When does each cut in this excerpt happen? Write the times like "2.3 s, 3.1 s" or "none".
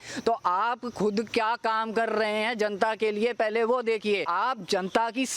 4.3 s